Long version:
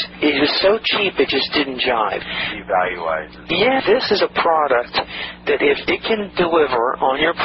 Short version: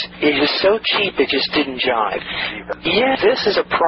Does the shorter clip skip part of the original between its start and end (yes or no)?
yes